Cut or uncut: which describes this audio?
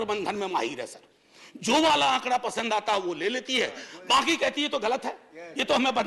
uncut